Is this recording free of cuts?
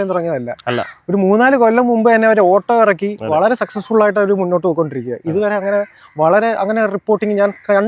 yes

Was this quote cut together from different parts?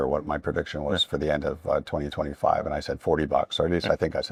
no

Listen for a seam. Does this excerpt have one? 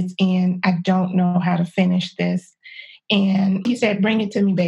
no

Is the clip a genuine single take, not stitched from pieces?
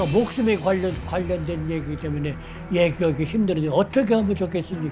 yes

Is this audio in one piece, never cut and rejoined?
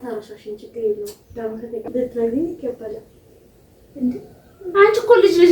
no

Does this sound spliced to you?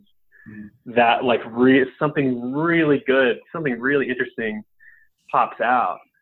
no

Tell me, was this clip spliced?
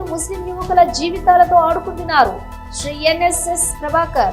no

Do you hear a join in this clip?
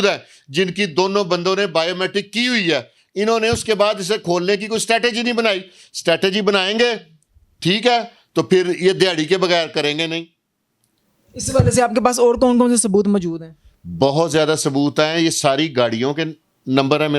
no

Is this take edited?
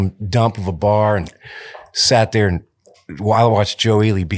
no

